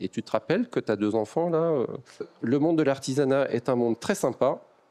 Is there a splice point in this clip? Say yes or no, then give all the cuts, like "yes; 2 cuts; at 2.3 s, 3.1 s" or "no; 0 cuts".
yes; 1 cut; at 2.3 s